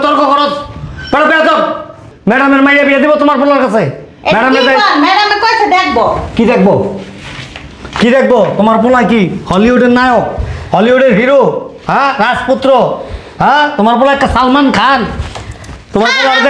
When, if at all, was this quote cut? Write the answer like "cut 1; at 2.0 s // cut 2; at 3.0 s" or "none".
cut 1; at 2.0 s